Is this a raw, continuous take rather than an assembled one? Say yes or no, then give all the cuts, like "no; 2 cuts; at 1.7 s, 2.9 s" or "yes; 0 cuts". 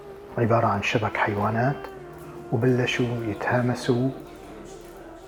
yes; 0 cuts